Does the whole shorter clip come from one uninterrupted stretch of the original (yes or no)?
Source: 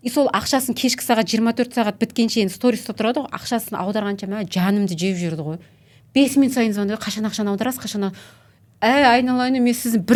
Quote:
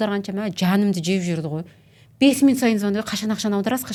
yes